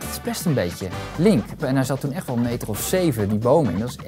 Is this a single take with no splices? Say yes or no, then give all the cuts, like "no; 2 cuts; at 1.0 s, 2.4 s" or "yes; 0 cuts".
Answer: no; 1 cut; at 1.6 s